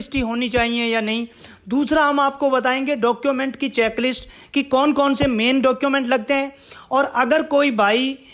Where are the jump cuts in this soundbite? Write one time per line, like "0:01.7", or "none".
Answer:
none